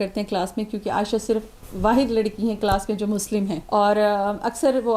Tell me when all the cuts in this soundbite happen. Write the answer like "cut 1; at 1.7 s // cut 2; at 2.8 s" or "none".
cut 1; at 3.6 s